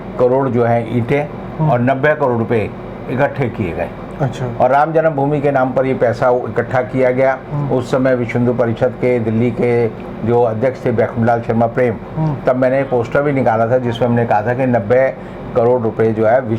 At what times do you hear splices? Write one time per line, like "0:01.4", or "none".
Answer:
none